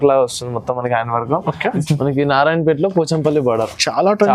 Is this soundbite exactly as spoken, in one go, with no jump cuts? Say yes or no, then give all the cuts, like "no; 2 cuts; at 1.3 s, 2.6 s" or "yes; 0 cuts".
no; 1 cut; at 1.7 s